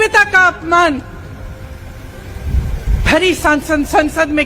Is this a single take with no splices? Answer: yes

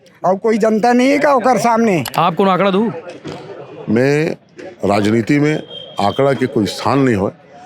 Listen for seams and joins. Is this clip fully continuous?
no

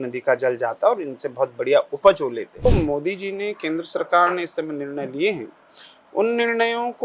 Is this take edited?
yes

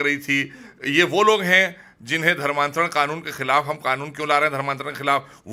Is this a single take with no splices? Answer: yes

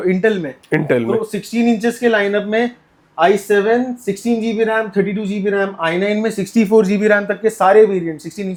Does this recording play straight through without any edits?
yes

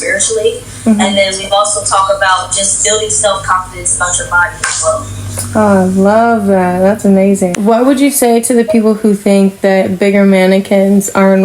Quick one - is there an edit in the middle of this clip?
yes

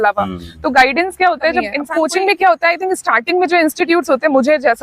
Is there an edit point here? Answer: yes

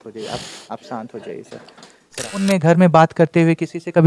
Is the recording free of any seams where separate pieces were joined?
no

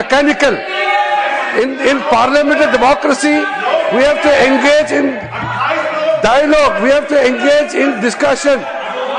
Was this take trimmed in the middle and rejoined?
no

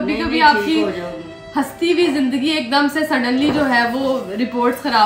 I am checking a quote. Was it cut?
no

